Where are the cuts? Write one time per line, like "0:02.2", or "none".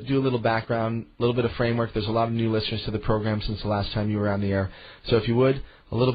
none